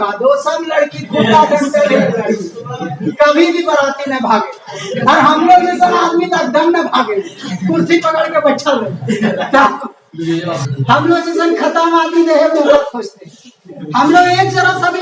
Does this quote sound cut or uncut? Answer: cut